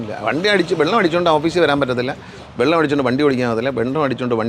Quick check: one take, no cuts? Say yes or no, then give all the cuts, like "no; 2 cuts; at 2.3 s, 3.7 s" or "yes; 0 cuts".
yes; 0 cuts